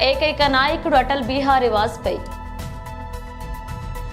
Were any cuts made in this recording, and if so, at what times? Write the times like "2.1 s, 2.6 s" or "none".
none